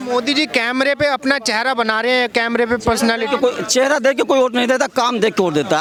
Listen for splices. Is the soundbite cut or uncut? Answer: uncut